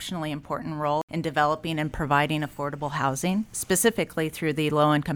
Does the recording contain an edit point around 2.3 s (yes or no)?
no